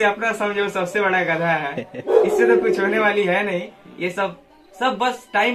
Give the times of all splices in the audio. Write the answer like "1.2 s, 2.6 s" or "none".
none